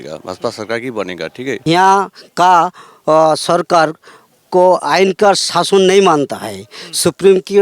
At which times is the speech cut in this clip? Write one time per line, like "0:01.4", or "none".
0:01.6